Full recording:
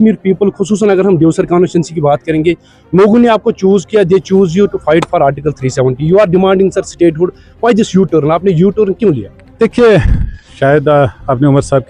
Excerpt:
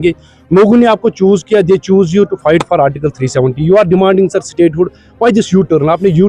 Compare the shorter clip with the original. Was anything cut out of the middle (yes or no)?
no